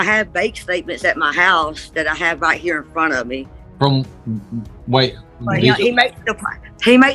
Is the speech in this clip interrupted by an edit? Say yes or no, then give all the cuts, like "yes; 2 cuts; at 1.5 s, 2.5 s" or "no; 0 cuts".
yes; 1 cut; at 3.6 s